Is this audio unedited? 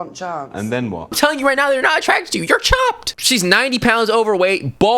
no; 2 cuts; at 1.2 s, 3.1 s

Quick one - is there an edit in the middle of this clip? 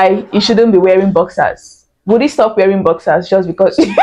no; 0 cuts

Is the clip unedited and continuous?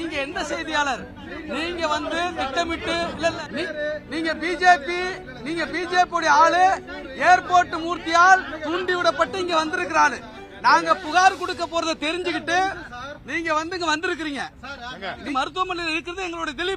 no; 2 cuts; at 3.3 s, 15.2 s

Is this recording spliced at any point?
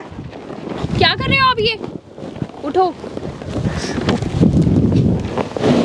no; 0 cuts

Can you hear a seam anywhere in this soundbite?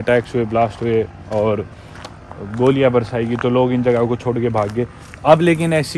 no; 0 cuts

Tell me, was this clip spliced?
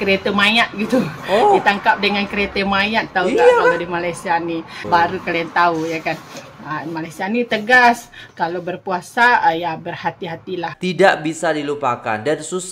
yes; 2 cuts; at 4.8 s, 10.7 s

